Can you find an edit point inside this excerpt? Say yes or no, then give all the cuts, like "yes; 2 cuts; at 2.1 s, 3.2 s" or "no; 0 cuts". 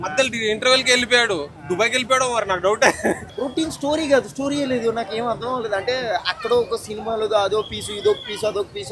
yes; 1 cut; at 3.3 s